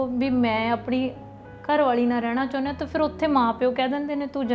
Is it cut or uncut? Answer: uncut